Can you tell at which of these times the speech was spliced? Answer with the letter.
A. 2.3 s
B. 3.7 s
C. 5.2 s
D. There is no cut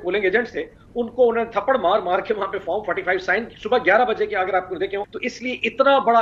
C